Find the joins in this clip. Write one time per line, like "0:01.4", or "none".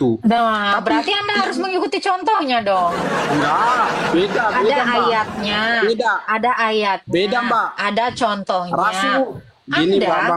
none